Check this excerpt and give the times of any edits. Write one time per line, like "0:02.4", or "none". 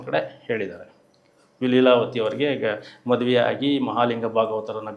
none

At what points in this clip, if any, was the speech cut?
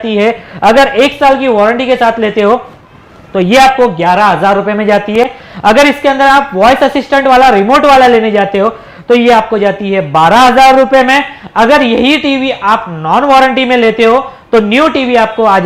none

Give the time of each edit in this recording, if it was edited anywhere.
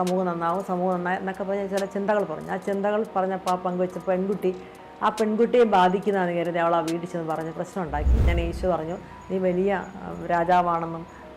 0:08.3

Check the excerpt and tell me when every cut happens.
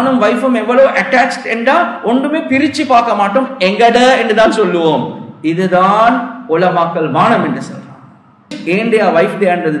0:08.6

